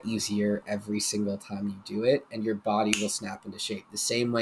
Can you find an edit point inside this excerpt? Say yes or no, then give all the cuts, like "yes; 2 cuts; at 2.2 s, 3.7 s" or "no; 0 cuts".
no; 0 cuts